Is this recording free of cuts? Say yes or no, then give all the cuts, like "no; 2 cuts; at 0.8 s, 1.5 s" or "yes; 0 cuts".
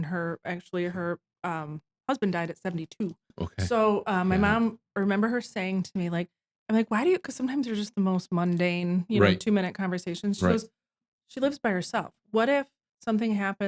yes; 0 cuts